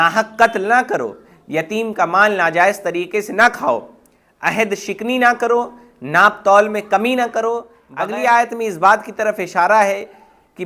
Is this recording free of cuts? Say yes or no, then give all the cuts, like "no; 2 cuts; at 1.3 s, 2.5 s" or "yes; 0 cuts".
no; 1 cut; at 7.8 s